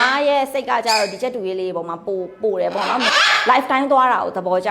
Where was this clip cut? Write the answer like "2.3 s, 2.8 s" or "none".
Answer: 3.1 s